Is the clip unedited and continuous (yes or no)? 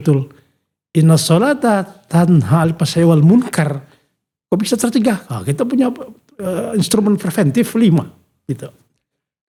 yes